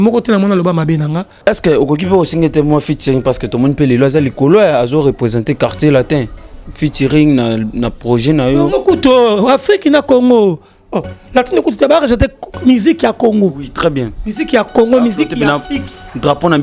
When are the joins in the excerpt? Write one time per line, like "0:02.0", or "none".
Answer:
0:01.4

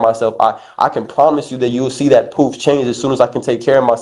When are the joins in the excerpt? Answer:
none

